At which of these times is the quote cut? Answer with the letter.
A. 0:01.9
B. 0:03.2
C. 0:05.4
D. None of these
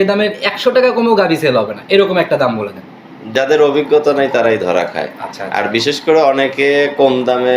B